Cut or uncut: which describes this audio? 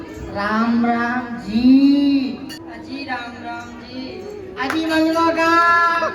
cut